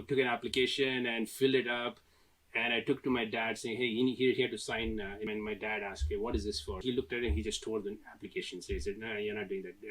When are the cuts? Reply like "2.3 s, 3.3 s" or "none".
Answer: 5.3 s, 6.8 s